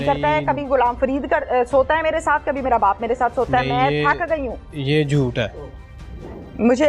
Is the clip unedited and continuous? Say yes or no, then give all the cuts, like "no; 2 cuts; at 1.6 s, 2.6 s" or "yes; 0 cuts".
yes; 0 cuts